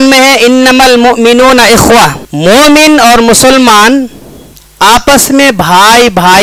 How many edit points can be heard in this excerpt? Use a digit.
1